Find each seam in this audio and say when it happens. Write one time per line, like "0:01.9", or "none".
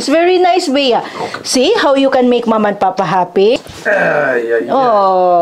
0:03.6